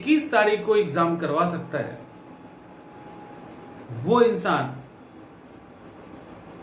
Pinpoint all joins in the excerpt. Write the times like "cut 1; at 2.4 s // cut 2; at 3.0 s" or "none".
none